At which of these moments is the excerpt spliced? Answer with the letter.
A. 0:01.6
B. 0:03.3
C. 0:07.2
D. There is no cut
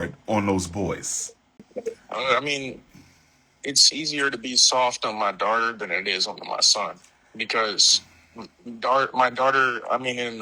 A